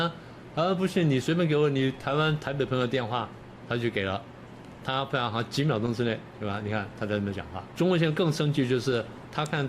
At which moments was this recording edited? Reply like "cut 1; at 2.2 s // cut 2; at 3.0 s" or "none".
cut 1; at 7.6 s